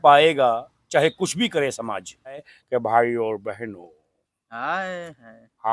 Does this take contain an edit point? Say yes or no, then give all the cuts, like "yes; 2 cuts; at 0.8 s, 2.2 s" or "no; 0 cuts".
yes; 1 cut; at 2.5 s